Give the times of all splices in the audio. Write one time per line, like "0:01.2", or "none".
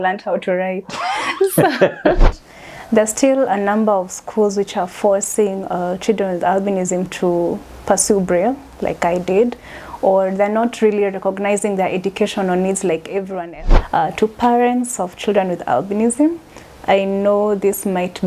0:02.3
0:13.4